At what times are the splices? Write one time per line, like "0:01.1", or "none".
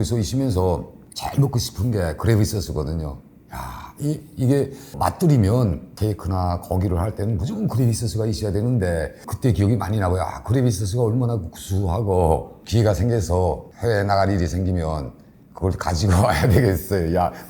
0:04.9
0:09.3
0:12.6